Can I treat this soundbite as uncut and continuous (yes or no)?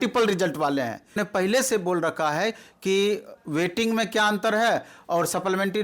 no